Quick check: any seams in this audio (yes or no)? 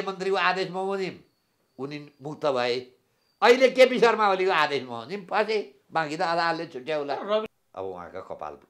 yes